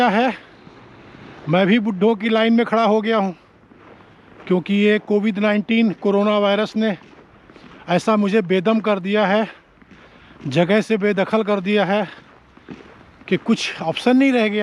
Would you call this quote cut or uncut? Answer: uncut